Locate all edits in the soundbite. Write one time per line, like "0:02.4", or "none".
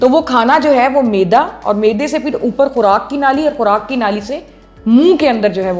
none